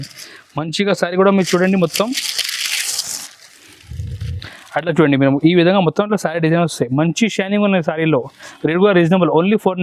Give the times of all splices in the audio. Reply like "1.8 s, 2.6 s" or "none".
none